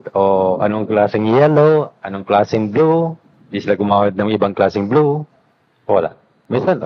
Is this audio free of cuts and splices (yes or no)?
yes